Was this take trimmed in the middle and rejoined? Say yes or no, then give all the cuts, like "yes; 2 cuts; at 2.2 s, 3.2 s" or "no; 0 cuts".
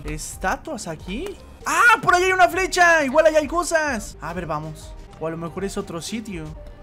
yes; 2 cuts; at 1.5 s, 4.1 s